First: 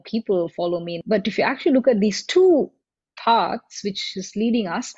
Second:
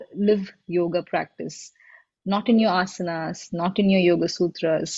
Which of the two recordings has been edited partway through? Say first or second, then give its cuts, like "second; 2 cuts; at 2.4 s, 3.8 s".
first; 1 cut; at 1.0 s